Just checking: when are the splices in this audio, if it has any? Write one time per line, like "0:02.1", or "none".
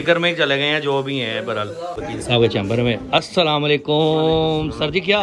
0:02.0

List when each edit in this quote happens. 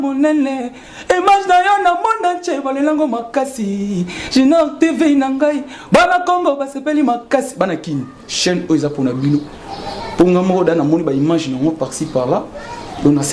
none

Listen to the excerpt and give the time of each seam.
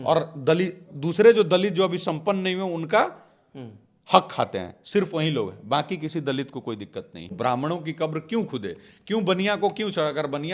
0:07.3

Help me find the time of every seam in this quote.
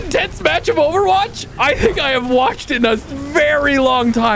none

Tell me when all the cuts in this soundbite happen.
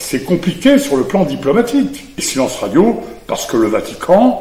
0:02.1

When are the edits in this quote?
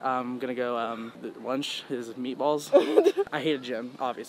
0:01.2
0:03.3

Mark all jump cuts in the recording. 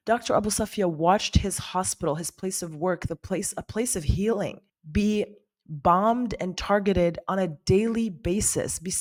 none

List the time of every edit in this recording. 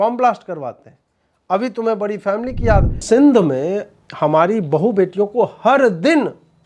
0:03.0

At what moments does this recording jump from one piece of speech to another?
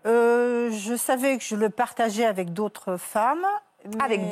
0:03.0

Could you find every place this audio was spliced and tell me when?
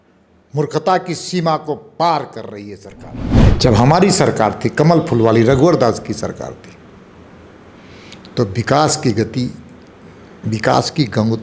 0:03.5

